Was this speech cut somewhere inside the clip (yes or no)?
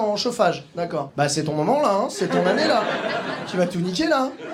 no